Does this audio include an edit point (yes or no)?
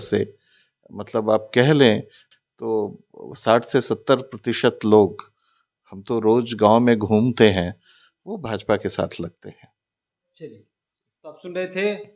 no